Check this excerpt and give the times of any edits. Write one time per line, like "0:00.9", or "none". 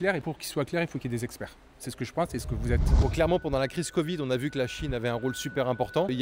none